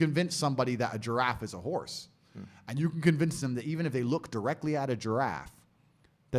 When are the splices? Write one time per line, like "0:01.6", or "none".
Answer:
none